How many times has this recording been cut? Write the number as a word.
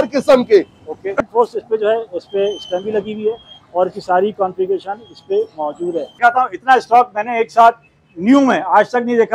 two